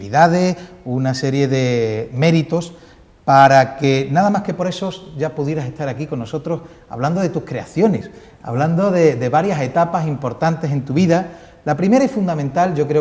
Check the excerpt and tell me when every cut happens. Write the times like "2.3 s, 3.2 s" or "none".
8.1 s